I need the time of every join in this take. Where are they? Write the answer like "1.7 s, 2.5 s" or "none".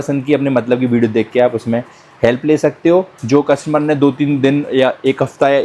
none